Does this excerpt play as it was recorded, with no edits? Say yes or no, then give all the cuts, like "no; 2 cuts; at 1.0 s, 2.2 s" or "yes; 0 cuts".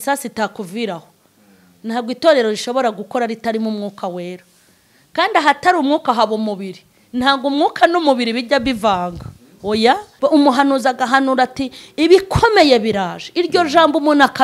no; 1 cut; at 10.1 s